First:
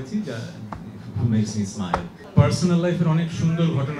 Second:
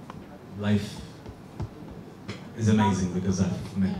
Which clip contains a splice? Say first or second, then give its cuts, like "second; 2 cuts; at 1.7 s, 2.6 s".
first; 1 cut; at 2.2 s